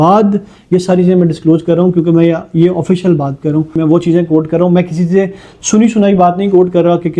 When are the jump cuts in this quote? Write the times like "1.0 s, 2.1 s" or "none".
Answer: 3.8 s